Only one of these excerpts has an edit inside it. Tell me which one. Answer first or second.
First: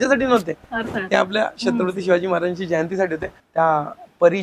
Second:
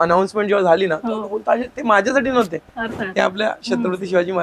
first